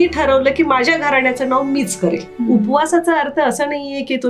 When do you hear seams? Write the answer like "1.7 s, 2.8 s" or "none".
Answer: 2.3 s

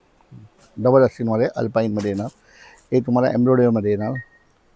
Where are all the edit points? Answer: none

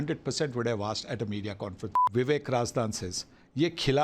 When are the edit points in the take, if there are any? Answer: 1.9 s

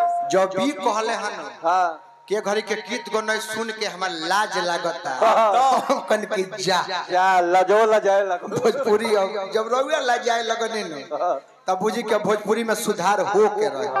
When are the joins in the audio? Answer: none

